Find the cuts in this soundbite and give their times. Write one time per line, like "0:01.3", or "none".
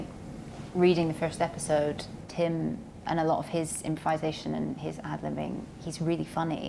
0:02.2